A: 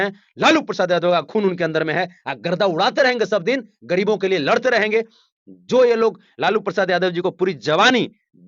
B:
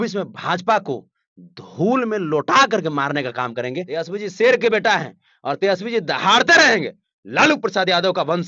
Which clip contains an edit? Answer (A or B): B